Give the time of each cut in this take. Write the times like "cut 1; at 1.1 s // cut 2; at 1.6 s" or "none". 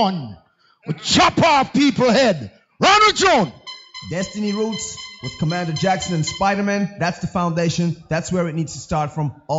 cut 1; at 5.8 s